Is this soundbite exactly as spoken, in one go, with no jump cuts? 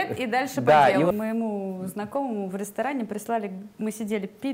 no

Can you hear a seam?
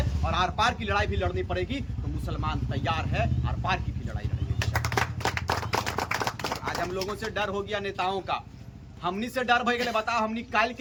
no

